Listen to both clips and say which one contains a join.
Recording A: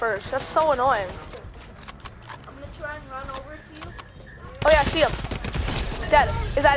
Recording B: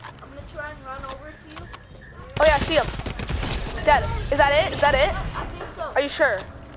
A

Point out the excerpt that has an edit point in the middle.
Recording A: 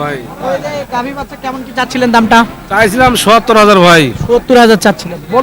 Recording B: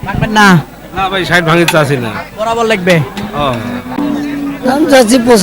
B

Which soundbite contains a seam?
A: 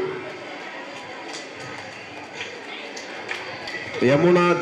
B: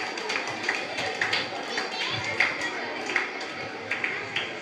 A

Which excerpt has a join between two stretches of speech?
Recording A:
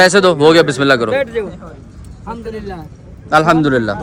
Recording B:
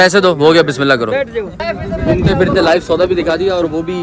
B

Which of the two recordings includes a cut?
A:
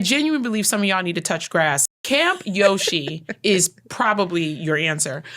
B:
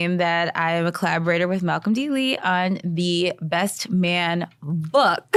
A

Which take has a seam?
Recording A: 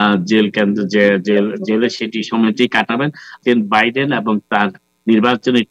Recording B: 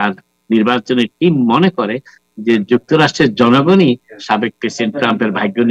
A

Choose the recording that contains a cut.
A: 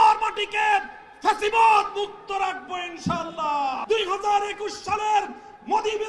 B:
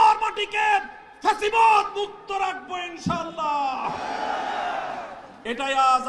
A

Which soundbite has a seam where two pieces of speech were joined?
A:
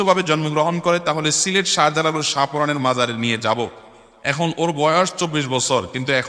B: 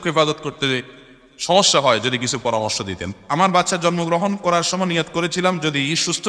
B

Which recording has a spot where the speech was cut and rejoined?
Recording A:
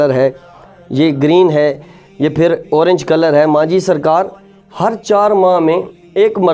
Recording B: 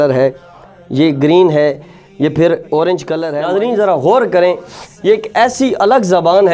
B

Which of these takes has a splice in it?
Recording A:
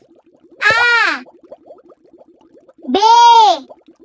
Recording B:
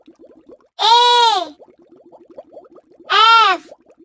B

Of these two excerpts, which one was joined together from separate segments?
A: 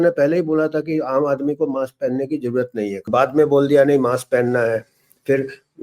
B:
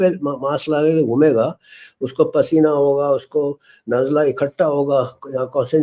A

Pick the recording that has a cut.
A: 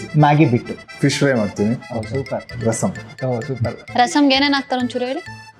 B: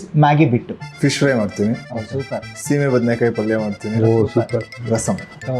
A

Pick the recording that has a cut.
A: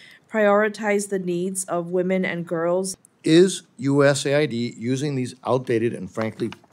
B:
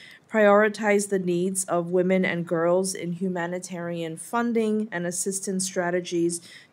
A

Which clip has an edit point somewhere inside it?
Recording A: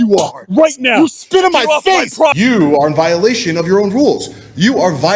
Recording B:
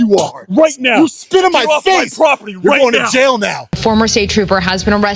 A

